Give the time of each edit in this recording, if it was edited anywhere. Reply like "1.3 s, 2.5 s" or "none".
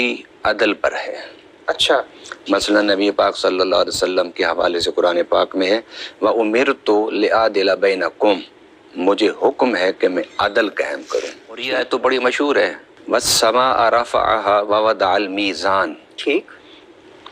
11.7 s